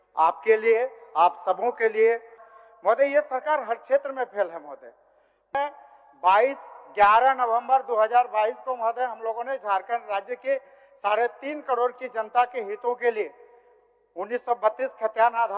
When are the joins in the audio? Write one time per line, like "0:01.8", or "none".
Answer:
0:02.5
0:05.5